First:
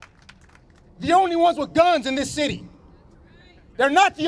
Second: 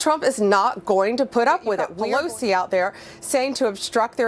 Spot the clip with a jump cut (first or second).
second